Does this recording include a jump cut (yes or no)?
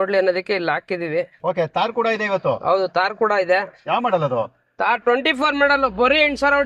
no